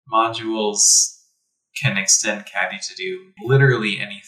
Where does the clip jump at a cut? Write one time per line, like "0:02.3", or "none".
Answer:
0:03.3